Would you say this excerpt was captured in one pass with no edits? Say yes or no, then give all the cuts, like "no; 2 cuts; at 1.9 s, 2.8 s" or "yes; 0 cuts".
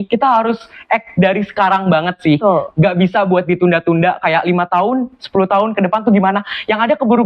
yes; 0 cuts